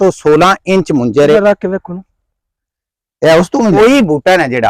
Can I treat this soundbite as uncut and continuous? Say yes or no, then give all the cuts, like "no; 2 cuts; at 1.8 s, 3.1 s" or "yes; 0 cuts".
no; 2 cuts; at 1.4 s, 3.8 s